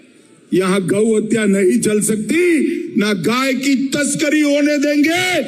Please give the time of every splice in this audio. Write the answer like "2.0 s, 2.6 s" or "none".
none